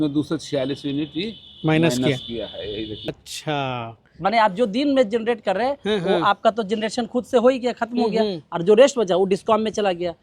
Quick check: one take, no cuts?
no; 1 cut; at 3.2 s

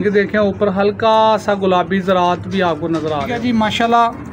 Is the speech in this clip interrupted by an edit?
yes; 1 cut; at 3.3 s

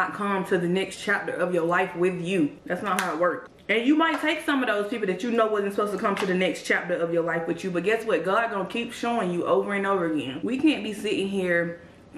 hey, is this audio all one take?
no; 2 cuts; at 3.5 s, 10.4 s

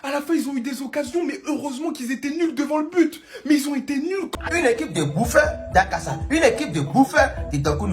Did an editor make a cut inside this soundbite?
yes; 1 cut; at 4.3 s

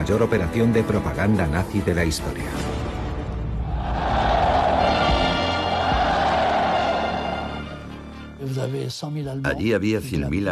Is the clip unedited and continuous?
yes; 0 cuts

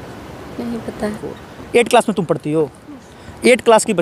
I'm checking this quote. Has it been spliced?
yes; 1 cut; at 1.2 s

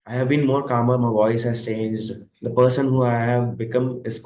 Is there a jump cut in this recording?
no; 0 cuts

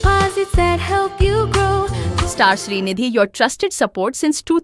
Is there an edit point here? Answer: yes; 1 cut; at 2.1 s

